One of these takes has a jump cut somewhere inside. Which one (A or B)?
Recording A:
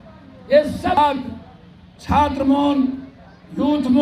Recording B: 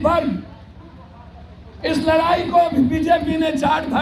A